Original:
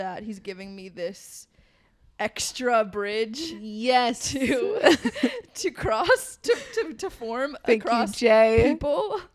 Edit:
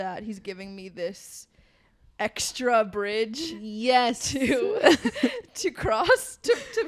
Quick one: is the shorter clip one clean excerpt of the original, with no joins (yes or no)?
yes